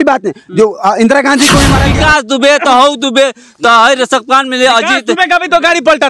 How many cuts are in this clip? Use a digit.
1